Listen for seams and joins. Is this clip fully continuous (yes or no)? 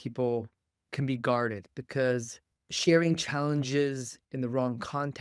no